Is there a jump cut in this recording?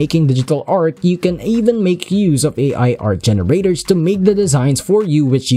no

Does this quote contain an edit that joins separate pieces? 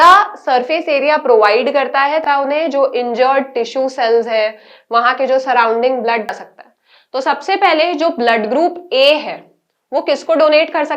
yes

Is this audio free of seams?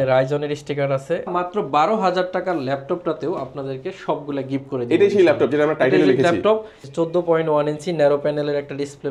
no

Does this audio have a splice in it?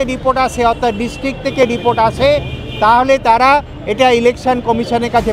no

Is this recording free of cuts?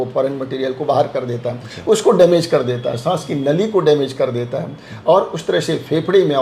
yes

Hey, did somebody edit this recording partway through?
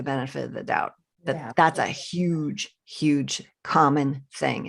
no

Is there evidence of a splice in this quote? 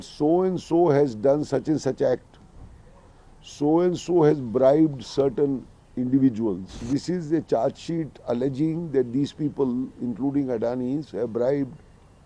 yes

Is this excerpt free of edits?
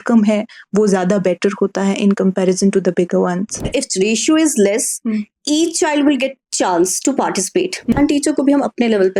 no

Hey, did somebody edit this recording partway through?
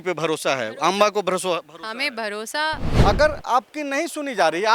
yes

